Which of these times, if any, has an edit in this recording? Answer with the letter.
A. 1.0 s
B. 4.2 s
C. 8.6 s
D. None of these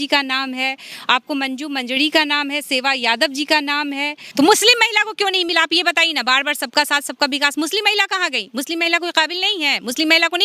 B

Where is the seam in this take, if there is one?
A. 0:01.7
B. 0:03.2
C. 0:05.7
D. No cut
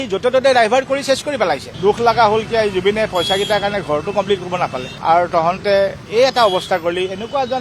A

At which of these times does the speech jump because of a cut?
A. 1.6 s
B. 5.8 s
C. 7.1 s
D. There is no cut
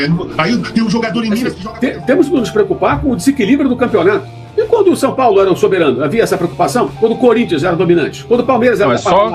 A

